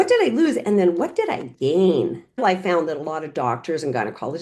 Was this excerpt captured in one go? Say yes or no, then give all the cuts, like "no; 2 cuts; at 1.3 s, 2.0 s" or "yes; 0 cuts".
no; 1 cut; at 2.4 s